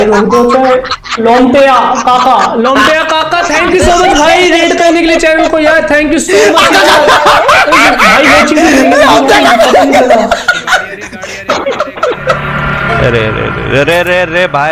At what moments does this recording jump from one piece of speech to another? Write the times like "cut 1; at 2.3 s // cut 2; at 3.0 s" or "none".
cut 1; at 12.5 s